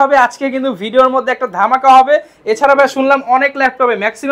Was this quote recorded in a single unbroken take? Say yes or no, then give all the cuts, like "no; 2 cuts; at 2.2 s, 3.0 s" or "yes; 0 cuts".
yes; 0 cuts